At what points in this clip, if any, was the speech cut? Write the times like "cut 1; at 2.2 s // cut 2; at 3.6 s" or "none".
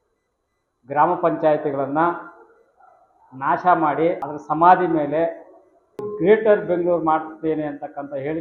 cut 1; at 4.3 s // cut 2; at 6.1 s

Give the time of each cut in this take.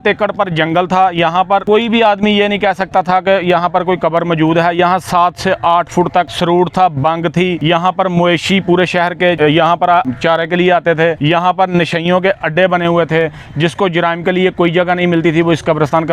cut 1; at 1.6 s // cut 2; at 6.3 s // cut 3; at 7.6 s // cut 4; at 9.4 s // cut 5; at 10.1 s // cut 6; at 11.2 s

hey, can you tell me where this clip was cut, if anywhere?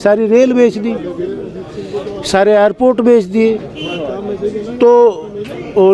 none

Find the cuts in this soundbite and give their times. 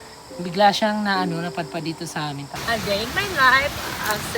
cut 1; at 2.5 s

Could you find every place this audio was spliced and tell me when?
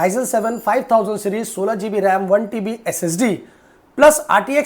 none

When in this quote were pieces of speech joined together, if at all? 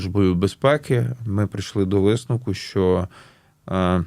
none

